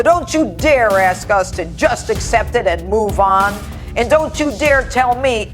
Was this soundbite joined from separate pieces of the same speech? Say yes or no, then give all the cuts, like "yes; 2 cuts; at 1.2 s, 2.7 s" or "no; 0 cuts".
no; 0 cuts